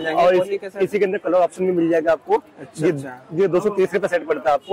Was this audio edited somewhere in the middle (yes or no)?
no